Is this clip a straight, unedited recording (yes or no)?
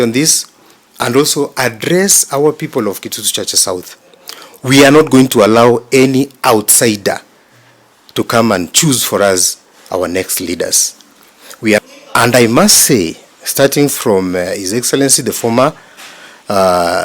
no